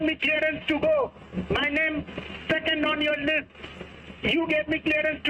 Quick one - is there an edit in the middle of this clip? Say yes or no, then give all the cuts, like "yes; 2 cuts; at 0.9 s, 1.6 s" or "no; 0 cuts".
yes; 1 cut; at 1.1 s